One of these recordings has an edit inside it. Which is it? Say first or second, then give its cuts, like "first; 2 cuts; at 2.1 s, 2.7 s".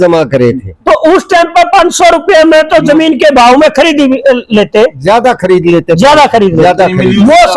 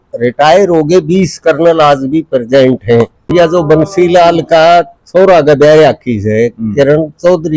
second; 1 cut; at 3.3 s